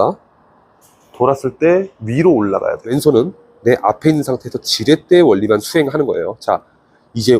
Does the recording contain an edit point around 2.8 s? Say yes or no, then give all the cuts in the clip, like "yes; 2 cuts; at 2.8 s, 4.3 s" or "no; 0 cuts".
yes; 1 cut; at 2.8 s